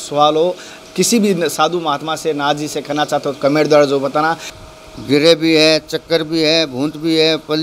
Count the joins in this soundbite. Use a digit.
1